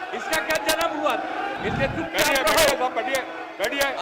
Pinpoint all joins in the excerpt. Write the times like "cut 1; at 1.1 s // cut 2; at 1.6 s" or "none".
cut 1; at 1.6 s